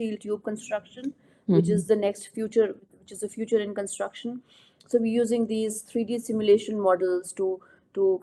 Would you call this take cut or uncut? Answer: uncut